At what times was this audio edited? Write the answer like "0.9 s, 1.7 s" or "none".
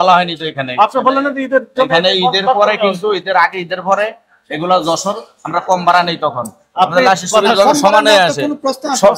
none